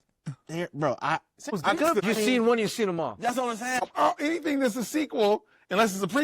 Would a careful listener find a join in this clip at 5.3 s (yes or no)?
no